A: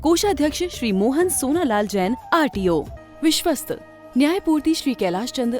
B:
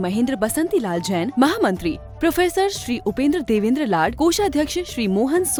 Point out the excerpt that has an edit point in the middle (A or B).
A